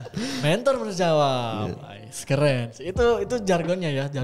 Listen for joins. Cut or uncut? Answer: uncut